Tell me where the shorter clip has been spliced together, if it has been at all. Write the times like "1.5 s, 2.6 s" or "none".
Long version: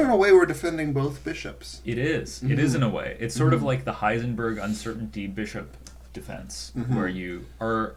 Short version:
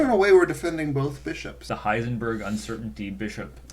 1.7 s